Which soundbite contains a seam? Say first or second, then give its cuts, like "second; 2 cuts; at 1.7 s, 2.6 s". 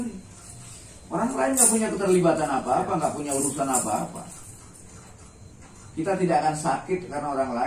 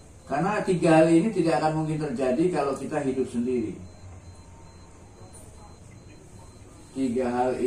second; 1 cut; at 5.1 s